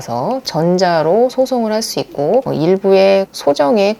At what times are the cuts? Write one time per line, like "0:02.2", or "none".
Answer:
0:02.5

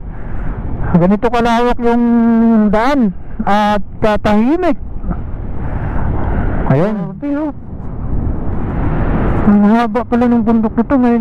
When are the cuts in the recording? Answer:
0:07.1

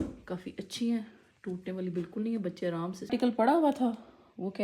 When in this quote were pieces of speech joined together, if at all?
0:03.1

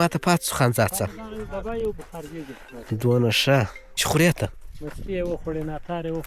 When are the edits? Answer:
none

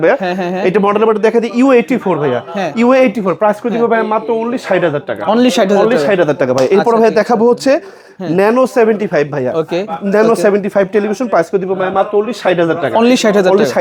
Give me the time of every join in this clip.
none

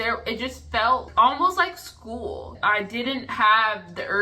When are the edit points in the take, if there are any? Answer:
0:01.1
0:02.5

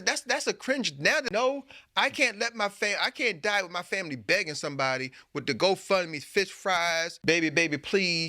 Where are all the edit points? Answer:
0:07.1

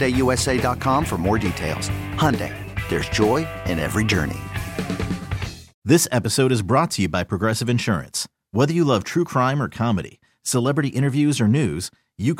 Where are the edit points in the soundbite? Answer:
0:05.7

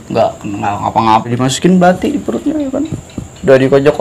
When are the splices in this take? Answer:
0:01.3

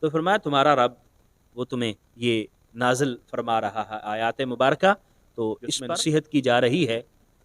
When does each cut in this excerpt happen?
0:05.7

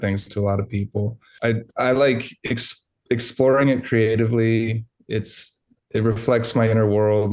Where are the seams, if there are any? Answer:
0:01.2

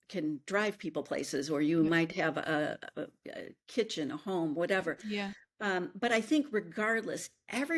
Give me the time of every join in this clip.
none

